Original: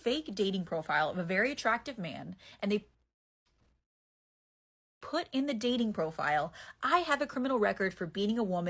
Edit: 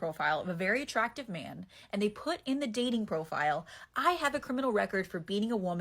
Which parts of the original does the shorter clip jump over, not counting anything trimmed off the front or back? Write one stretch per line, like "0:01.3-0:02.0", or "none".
0:02.9-0:05.0